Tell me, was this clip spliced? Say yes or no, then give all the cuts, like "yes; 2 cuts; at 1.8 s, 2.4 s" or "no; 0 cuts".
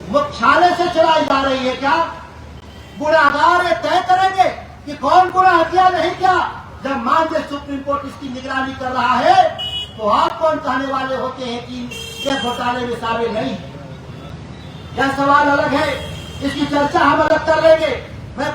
no; 0 cuts